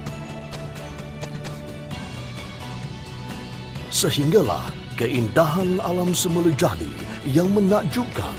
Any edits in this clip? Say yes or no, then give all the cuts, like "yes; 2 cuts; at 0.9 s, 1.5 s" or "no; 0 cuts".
no; 0 cuts